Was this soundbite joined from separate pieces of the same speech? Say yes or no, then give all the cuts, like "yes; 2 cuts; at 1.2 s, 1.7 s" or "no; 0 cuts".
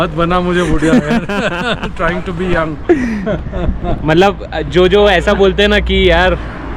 no; 0 cuts